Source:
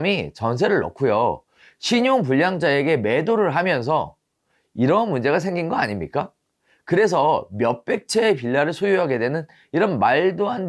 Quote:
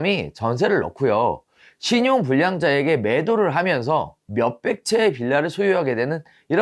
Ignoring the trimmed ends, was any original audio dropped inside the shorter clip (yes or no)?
yes